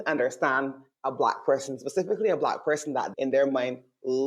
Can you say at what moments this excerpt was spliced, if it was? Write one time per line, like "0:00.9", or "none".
0:03.1